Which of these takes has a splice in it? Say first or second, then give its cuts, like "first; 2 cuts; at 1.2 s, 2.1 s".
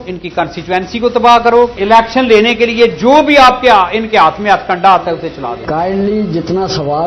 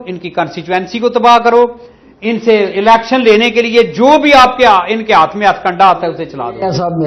first; 2 cuts; at 1.8 s, 5.6 s